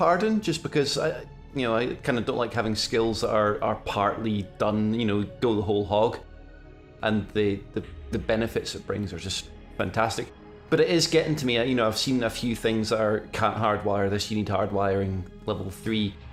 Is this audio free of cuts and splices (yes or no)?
yes